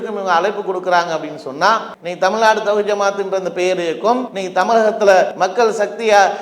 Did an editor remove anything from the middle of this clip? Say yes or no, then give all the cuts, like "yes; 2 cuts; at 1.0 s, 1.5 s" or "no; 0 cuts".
yes; 3 cuts; at 2.0 s, 4.3 s, 5.3 s